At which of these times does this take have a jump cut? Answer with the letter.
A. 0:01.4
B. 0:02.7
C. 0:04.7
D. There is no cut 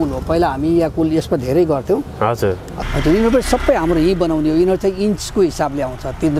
B